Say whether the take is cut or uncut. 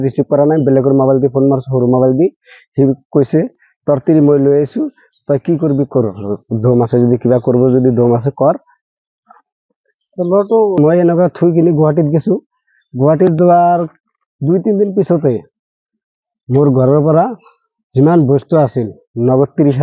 cut